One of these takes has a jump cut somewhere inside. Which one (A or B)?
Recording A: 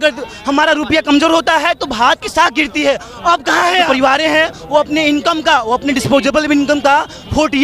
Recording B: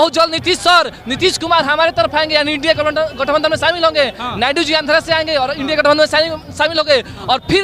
A